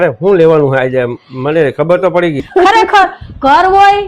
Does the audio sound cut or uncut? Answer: cut